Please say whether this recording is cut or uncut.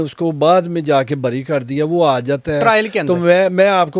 uncut